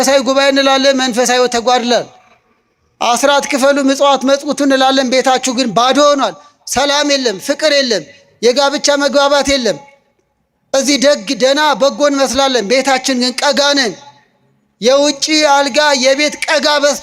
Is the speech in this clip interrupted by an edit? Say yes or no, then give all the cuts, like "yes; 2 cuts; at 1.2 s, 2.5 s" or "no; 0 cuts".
no; 0 cuts